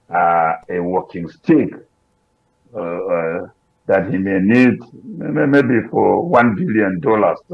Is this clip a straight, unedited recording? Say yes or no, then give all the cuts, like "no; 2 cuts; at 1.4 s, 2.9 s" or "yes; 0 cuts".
yes; 0 cuts